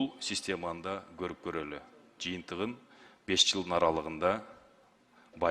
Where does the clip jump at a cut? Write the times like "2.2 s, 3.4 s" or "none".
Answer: none

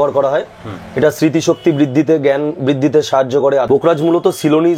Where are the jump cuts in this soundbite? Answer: 3.7 s

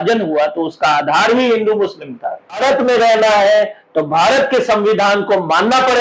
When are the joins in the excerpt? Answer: 2.6 s

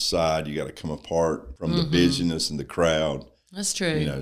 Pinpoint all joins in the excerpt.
1.5 s

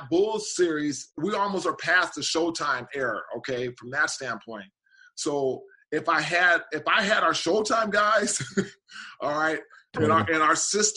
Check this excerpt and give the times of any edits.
1.2 s

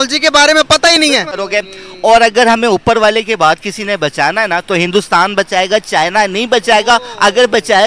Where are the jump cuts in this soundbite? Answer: 1.3 s

